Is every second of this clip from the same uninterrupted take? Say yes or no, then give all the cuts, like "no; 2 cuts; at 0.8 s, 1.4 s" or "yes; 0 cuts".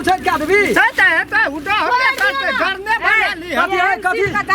yes; 0 cuts